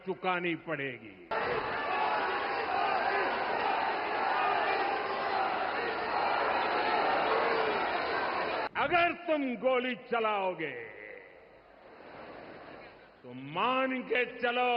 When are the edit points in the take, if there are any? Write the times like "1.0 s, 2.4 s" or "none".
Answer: 1.3 s, 8.7 s

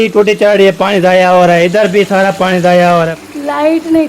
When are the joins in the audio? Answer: 3.2 s

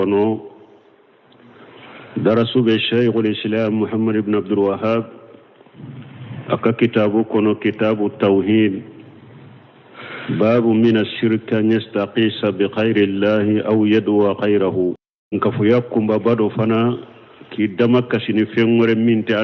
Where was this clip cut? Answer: 15.4 s

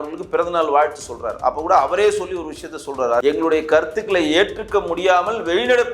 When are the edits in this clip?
3.2 s

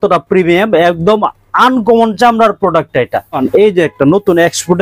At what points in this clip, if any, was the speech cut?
3.4 s

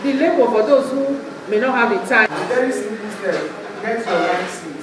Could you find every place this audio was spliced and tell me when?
2.3 s

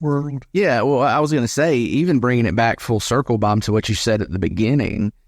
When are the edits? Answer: none

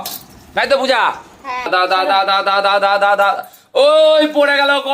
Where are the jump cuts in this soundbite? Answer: 1.7 s

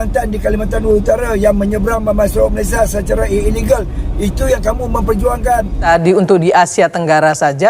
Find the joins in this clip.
5.8 s

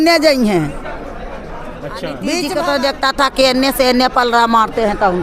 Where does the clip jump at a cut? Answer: 2.5 s

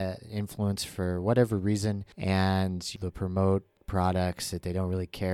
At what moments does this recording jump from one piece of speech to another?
2.1 s, 2.9 s

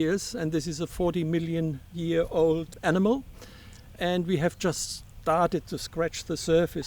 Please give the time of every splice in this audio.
2.7 s

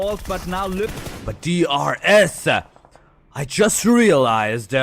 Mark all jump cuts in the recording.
0.9 s

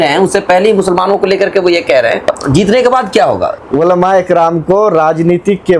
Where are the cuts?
2.4 s, 3.5 s

